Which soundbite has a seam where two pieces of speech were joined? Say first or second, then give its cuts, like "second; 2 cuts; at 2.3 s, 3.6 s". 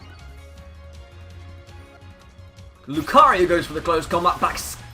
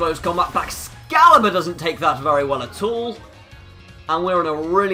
first; 1 cut; at 2.0 s